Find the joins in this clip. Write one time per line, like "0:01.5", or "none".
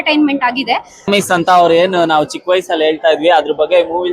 0:01.1